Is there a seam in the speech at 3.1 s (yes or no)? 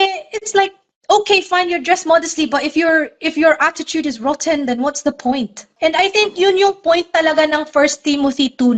no